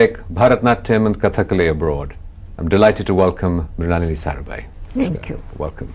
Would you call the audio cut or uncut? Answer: uncut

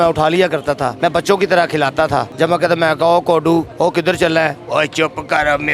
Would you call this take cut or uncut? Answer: cut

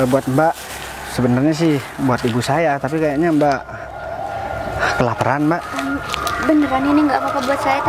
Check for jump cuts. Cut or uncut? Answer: uncut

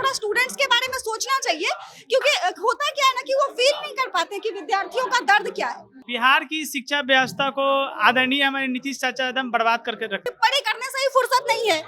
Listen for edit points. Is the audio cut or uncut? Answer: cut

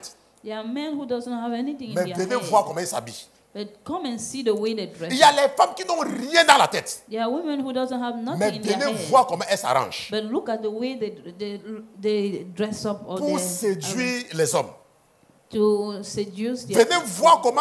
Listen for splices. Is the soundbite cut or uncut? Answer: uncut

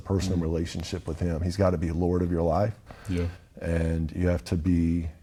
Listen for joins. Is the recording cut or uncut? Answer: uncut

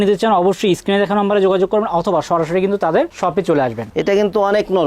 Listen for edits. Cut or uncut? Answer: cut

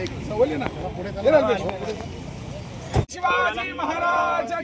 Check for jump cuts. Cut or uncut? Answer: cut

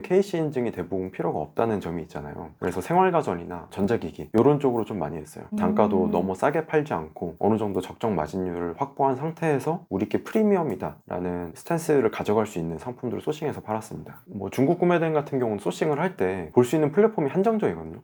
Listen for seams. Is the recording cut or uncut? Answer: uncut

